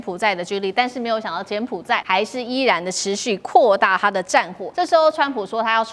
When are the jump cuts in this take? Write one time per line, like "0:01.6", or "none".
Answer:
0:02.0
0:04.6